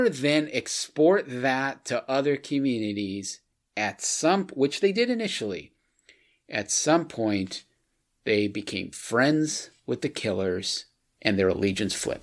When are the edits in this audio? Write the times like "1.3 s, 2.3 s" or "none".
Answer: none